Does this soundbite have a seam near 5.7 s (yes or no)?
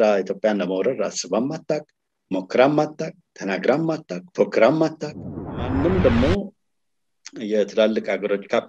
yes